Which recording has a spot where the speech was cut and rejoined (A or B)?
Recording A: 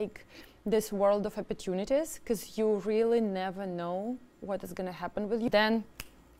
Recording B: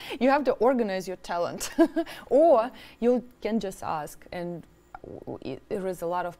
A